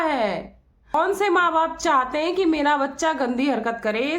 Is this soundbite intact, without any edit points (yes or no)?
no